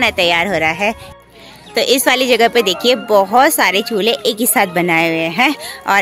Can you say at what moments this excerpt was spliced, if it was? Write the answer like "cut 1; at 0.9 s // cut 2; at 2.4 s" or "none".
cut 1; at 1.1 s

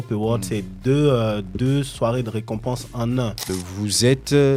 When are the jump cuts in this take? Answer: cut 1; at 3.5 s

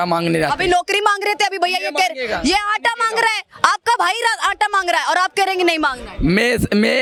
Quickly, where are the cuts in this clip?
none

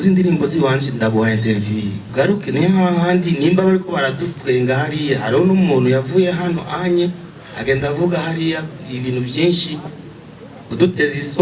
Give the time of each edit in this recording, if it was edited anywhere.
cut 1; at 2.0 s

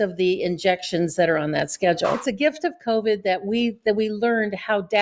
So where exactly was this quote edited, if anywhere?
cut 1; at 2.2 s

